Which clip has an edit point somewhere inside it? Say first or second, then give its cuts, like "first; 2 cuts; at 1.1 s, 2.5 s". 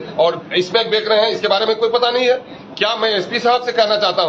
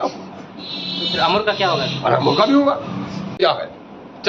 second; 1 cut; at 3.3 s